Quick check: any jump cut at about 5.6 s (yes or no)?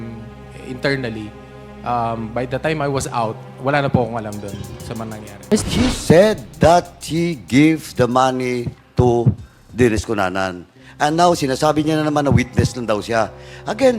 yes